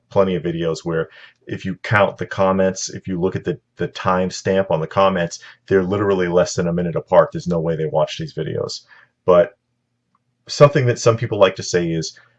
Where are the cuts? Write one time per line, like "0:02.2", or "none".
0:07.0